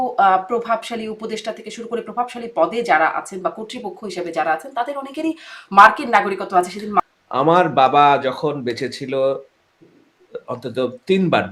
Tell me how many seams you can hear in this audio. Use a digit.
1